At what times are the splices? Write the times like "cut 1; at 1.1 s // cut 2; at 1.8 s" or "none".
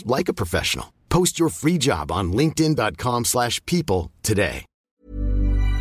cut 1; at 4.7 s